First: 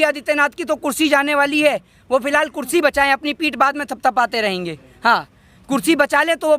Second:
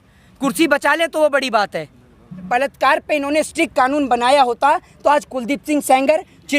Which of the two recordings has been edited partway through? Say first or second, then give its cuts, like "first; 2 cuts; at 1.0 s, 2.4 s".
second; 1 cut; at 2.5 s